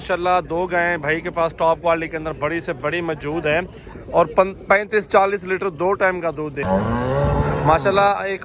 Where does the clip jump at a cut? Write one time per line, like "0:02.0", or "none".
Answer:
0:06.6